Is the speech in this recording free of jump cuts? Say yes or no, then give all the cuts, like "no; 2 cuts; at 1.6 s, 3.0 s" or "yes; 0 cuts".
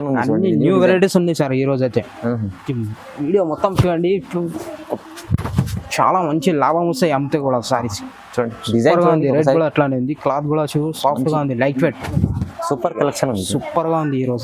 no; 1 cut; at 12.0 s